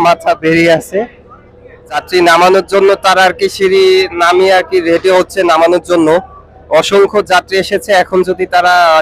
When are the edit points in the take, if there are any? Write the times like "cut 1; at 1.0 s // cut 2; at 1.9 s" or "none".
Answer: cut 1; at 2.0 s